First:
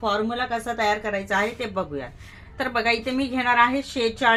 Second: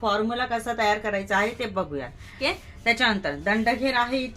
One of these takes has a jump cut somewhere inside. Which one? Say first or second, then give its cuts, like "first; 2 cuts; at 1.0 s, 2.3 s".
second; 1 cut; at 2.4 s